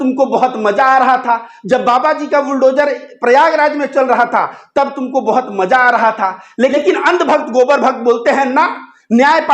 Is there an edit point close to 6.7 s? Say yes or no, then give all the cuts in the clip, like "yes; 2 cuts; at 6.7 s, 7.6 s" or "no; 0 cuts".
yes; 1 cut; at 6.7 s